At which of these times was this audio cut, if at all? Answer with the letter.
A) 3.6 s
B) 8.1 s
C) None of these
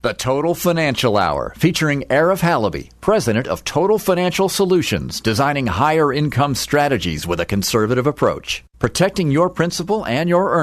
C